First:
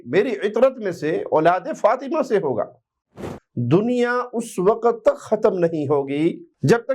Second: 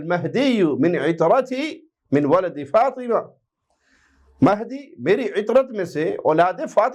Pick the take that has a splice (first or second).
first